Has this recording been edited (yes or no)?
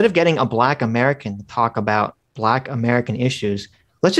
no